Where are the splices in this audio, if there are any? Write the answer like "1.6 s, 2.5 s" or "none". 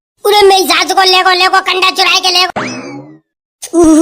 2.5 s